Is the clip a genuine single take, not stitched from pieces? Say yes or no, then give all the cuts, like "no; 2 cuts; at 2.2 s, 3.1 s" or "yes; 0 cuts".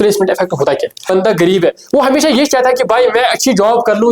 no; 1 cut; at 1.1 s